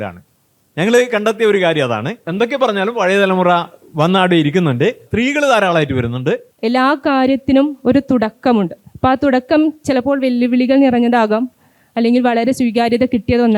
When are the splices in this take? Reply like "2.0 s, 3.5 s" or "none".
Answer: 2.2 s, 5.1 s, 6.5 s

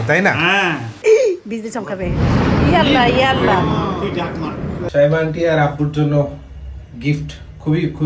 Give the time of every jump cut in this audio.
1.0 s, 4.8 s

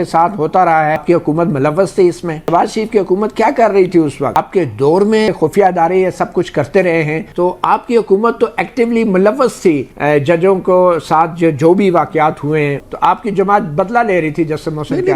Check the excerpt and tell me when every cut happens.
1.0 s, 2.4 s, 4.4 s, 5.3 s, 7.3 s, 12.9 s

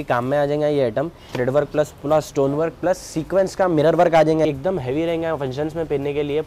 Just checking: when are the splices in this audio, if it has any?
1.3 s, 4.4 s

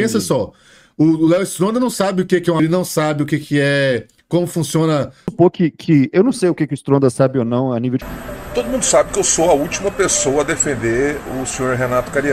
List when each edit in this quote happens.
2.6 s, 5.3 s, 8.0 s

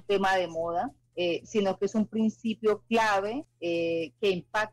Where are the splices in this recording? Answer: 1.0 s, 3.5 s

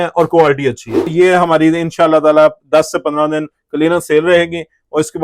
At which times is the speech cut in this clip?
1.1 s

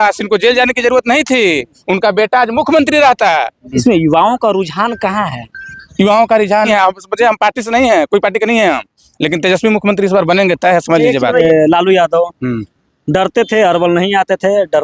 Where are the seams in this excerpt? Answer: 3.8 s, 6.7 s, 11.4 s

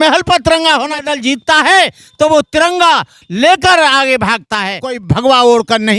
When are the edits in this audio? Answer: 1.1 s, 5.0 s

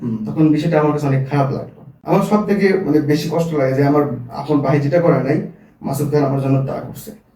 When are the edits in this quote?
2.0 s

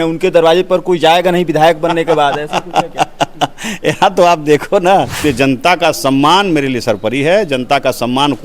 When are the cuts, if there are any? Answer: 5.1 s

